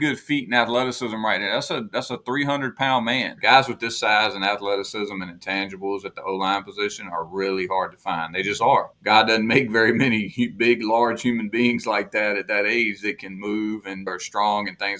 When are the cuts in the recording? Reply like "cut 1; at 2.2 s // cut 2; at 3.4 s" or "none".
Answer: cut 1; at 3.4 s // cut 2; at 8.9 s // cut 3; at 14.1 s